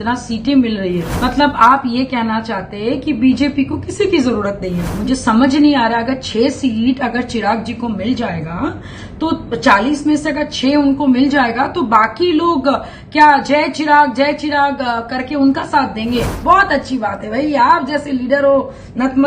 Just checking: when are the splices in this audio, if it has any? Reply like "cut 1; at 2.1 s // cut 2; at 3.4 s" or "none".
cut 1; at 1.1 s // cut 2; at 4.9 s // cut 3; at 16.3 s